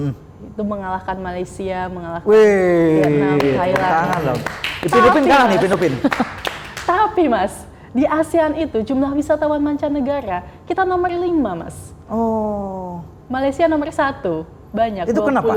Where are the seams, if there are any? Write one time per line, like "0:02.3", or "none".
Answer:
none